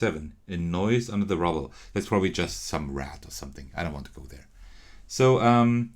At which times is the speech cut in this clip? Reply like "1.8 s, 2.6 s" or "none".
none